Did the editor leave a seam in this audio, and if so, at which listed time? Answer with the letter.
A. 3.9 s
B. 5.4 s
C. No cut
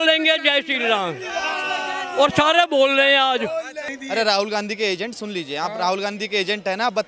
A